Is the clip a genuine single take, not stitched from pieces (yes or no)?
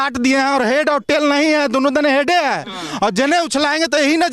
yes